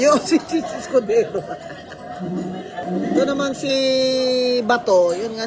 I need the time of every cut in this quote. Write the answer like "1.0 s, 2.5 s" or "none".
2.8 s